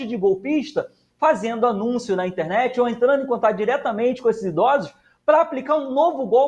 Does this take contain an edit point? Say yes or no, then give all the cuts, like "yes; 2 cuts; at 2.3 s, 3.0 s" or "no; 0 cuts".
no; 0 cuts